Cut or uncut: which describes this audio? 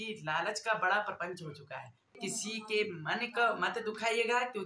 cut